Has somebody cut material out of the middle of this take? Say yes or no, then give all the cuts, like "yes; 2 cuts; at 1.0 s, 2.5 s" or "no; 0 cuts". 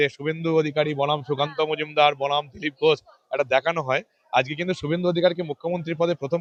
no; 0 cuts